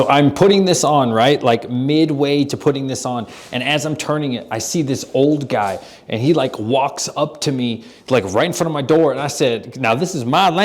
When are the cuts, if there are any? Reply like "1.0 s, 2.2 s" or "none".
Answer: none